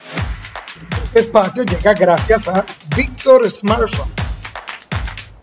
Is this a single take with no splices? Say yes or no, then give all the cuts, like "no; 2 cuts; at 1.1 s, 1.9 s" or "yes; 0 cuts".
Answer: no; 2 cuts; at 1.1 s, 4.3 s